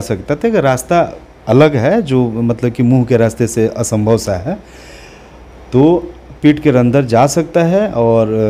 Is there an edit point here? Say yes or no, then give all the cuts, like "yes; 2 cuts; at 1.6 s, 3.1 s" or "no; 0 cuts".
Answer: no; 0 cuts